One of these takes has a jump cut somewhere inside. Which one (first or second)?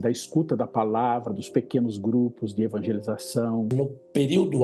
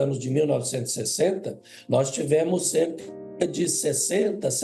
first